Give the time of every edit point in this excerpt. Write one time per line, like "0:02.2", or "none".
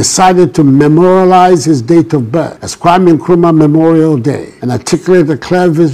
0:04.6